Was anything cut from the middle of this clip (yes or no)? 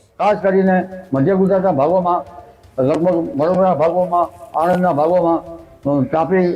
no